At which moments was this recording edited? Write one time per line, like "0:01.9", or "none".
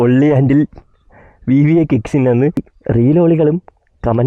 0:02.7